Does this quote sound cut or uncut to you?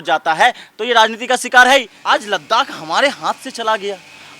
cut